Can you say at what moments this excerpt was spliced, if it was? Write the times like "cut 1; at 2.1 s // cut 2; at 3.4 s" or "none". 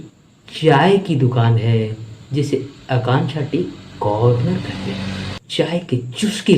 cut 1; at 5.3 s